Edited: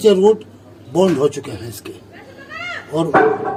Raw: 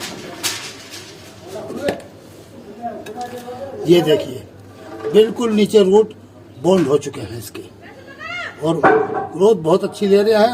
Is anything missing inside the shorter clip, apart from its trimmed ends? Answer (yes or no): no